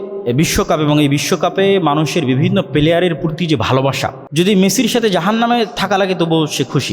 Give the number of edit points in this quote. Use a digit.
1